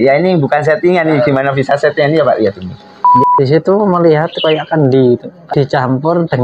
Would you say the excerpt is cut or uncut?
cut